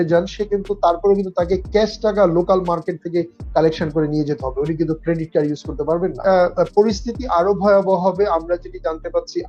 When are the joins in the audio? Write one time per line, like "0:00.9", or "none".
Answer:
0:06.2